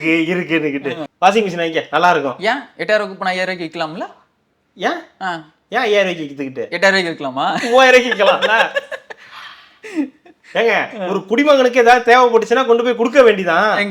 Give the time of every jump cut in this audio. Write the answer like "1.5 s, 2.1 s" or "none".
1.0 s